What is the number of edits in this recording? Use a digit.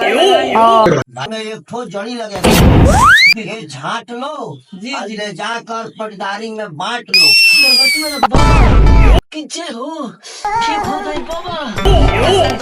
1